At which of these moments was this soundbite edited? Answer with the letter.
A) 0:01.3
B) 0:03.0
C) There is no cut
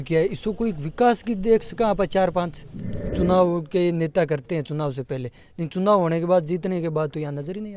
B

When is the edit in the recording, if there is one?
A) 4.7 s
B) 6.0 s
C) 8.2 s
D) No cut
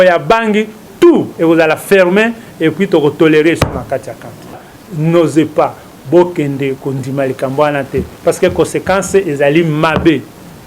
A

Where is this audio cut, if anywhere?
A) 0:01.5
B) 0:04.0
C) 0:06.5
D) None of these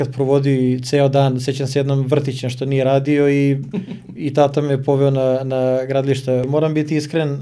C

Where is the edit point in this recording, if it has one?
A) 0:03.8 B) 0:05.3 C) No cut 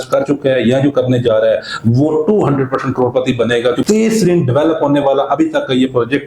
A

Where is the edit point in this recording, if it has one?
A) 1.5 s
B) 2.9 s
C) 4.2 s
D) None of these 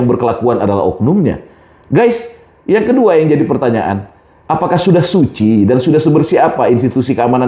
D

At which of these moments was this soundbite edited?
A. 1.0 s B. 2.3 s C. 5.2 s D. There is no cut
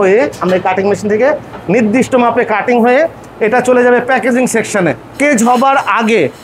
C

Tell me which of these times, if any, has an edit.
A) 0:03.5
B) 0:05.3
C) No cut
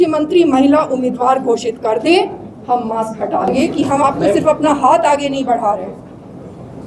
A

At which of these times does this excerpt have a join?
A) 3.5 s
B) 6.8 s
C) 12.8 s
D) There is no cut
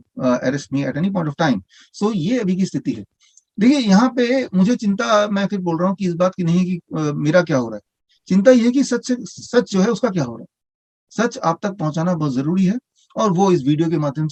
D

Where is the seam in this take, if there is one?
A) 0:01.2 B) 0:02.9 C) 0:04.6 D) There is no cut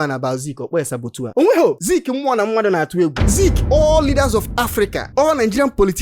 A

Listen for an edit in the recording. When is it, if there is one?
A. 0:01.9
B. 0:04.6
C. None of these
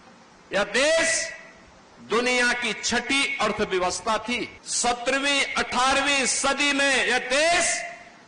B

